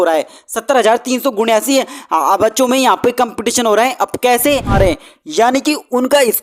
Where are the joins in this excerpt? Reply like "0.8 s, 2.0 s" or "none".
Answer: 4.7 s

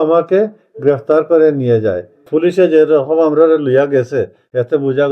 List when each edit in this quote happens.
2.2 s

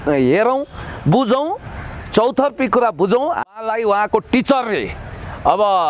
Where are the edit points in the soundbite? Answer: 3.5 s

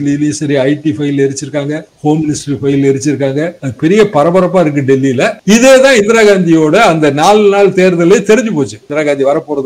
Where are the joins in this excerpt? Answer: none

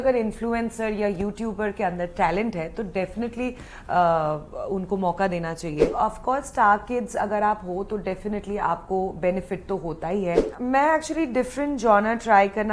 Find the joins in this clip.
5.9 s, 10.5 s

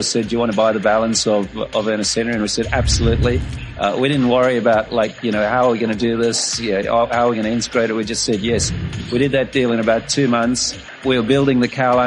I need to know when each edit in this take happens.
11.0 s

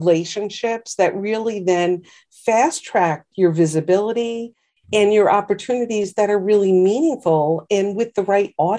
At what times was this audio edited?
none

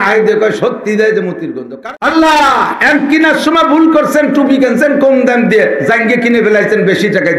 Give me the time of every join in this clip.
1.5 s

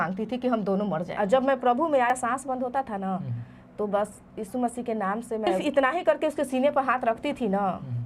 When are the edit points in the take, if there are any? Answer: 1.1 s, 2.1 s, 5.6 s

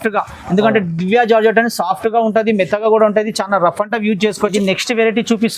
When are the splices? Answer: 4.5 s

